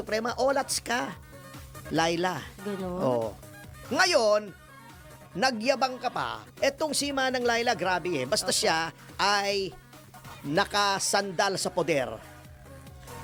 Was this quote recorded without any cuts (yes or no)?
yes